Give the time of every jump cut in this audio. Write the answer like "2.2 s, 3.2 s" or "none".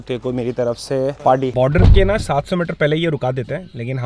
1.5 s

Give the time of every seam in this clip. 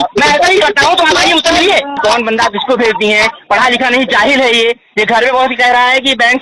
2.0 s

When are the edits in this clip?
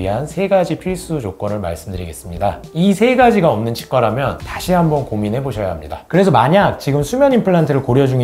4.4 s, 5.9 s

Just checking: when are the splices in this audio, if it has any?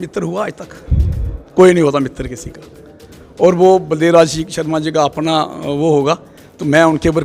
none

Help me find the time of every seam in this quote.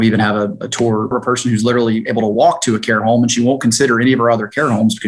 1.1 s

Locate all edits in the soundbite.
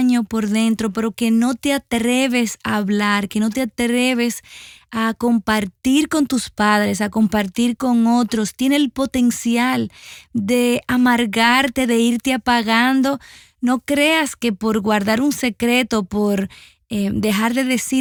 none

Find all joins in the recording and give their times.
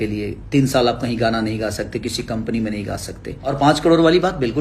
3.5 s

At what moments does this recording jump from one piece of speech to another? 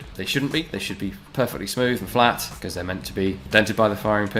3.4 s

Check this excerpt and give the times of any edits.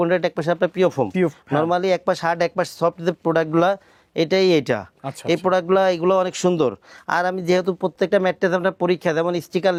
none

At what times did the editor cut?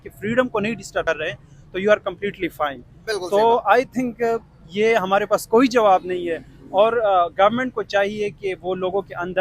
1.0 s

